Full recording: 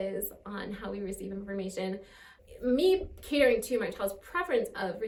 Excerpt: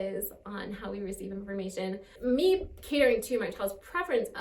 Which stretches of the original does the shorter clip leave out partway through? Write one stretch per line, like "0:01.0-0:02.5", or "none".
0:02.1-0:02.5